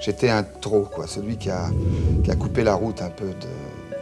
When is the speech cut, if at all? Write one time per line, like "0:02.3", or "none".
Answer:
none

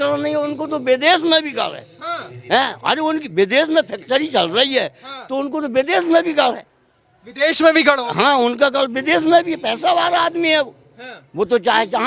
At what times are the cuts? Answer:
none

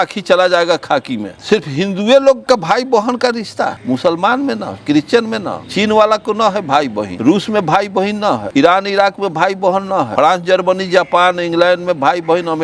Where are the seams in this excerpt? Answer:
0:01.3
0:02.4
0:03.8
0:07.1
0:08.4
0:10.1

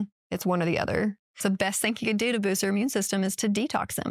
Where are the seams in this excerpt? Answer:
0:01.3

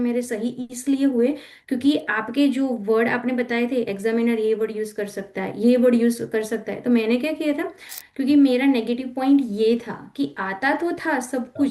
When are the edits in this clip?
0:07.8

